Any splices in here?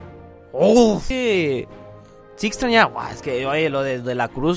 yes; 1 cut; at 1.1 s

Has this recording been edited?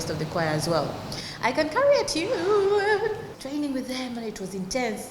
yes; 1 cut; at 3.3 s

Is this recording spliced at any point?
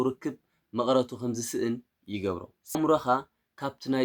yes; 1 cut; at 2.8 s

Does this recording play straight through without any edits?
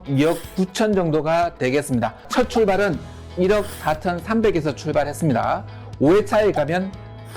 no; 1 cut; at 2.2 s

